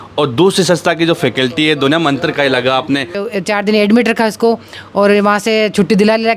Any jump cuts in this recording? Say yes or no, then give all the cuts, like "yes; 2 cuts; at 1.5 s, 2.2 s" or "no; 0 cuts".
yes; 1 cut; at 3.2 s